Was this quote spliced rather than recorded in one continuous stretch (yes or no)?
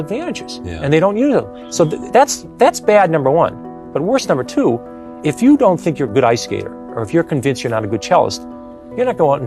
no